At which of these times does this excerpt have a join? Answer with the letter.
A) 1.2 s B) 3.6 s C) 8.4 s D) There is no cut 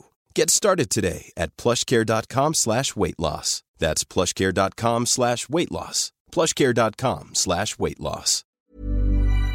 C